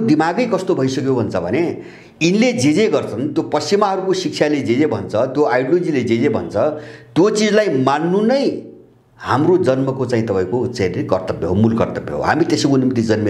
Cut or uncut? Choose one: uncut